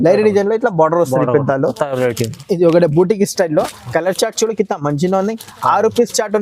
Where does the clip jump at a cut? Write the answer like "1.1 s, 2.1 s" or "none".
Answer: none

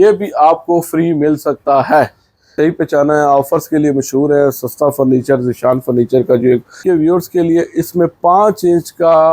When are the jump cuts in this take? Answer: 2.5 s, 6.8 s

